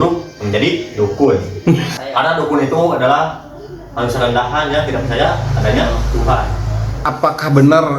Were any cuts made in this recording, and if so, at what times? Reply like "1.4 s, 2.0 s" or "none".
1.9 s, 6.9 s